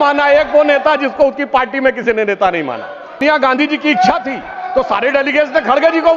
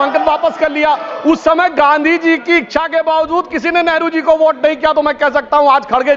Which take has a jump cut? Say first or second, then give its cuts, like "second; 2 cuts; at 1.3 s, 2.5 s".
first; 1 cut; at 3.2 s